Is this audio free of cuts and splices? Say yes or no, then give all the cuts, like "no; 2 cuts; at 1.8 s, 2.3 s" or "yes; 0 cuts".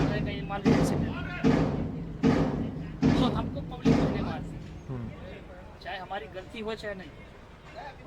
yes; 0 cuts